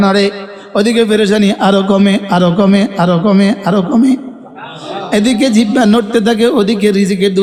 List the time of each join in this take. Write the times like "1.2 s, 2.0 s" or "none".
none